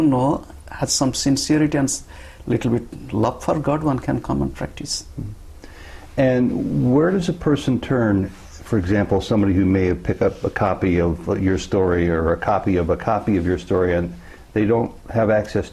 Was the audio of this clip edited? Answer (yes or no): no